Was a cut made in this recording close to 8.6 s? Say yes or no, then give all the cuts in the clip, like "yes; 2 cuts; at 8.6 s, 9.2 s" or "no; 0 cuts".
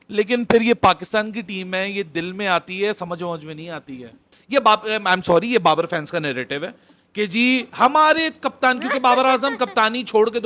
no; 1 cut; at 4.4 s